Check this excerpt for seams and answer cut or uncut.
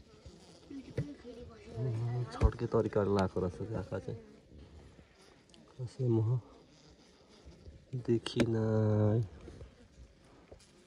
uncut